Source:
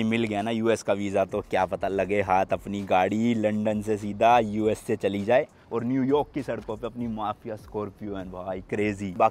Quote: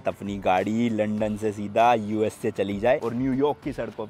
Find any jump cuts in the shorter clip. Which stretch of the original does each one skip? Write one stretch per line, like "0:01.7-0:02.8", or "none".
0:05.5-0:05.7